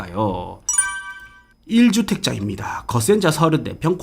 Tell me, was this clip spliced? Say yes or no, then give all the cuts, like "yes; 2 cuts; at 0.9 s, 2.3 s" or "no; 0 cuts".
yes; 1 cut; at 1.0 s